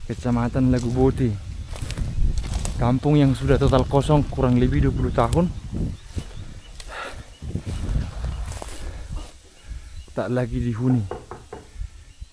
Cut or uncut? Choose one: uncut